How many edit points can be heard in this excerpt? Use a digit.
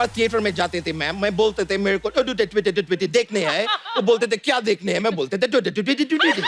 0